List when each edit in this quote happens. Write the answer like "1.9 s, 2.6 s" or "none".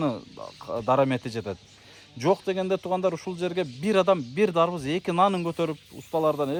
none

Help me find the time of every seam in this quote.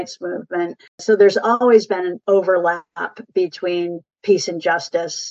1.0 s, 2.2 s

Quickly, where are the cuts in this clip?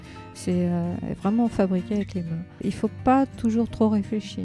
2.6 s

